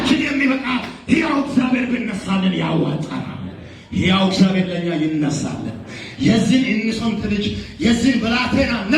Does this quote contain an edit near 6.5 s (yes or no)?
yes